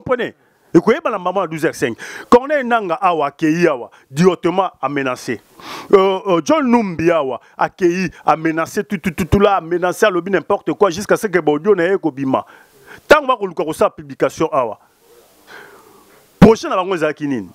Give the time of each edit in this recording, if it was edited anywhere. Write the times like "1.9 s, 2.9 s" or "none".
none

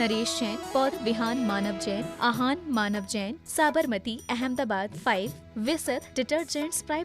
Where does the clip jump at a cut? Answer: 1.0 s

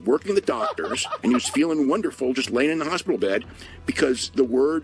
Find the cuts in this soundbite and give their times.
1.1 s

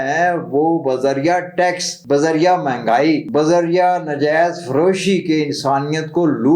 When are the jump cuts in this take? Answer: 1.9 s, 3.3 s

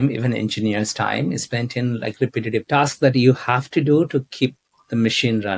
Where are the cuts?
2.6 s

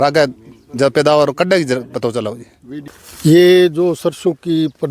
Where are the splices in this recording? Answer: 2.7 s

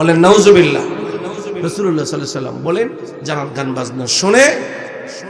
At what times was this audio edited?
1.6 s

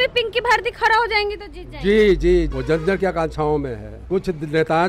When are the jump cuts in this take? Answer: 2.5 s, 3.9 s

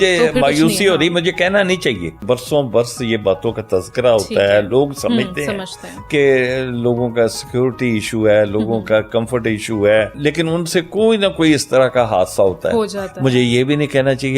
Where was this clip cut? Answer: 2.2 s, 10.1 s

